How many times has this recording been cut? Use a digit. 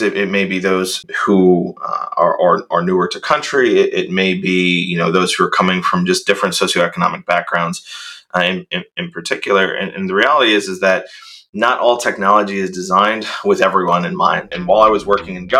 2